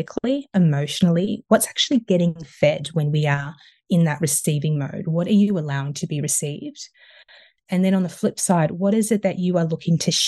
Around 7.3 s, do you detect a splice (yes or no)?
no